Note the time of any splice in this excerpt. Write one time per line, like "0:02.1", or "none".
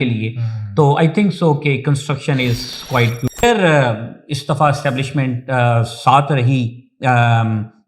0:03.3